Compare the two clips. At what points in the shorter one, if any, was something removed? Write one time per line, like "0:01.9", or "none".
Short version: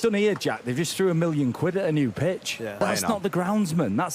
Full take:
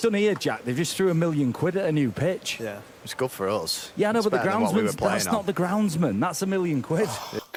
0:02.8